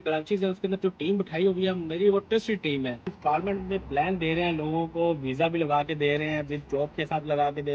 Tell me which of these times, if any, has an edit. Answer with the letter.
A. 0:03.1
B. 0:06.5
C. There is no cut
A